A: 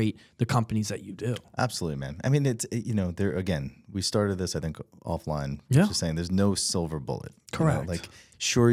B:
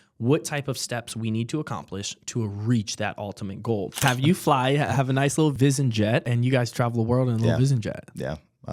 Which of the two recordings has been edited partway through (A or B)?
B